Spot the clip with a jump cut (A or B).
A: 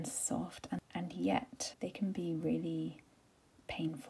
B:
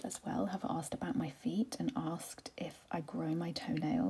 A